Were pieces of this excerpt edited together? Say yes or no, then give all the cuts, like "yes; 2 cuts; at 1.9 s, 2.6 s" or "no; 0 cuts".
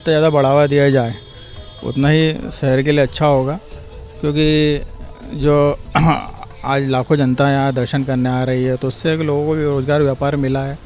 no; 0 cuts